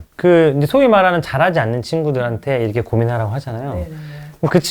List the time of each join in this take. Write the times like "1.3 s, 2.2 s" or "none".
none

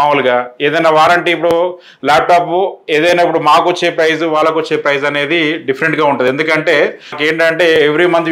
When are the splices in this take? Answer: 7.2 s

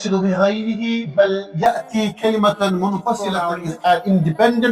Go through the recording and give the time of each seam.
3.4 s

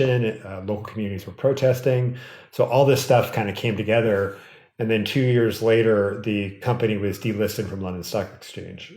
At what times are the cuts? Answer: none

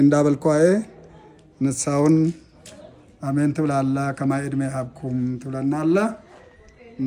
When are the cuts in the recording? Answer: none

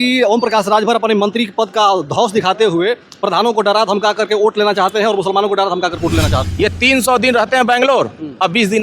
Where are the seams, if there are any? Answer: 6.4 s

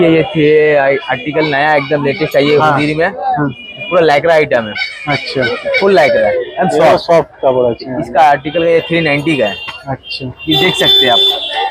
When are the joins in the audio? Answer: none

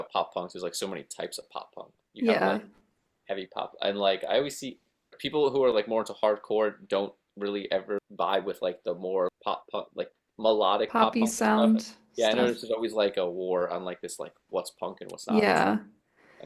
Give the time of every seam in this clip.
5.2 s, 8.0 s, 9.3 s

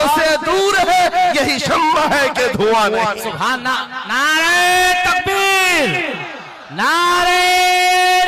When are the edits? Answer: none

